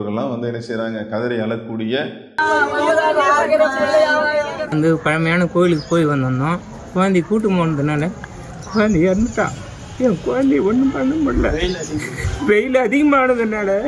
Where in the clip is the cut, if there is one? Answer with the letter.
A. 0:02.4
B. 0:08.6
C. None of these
C